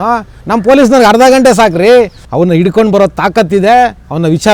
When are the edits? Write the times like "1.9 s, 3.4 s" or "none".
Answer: 2.2 s